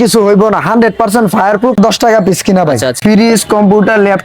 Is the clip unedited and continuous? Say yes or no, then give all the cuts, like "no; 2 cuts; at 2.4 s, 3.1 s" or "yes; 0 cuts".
no; 2 cuts; at 1.8 s, 3.0 s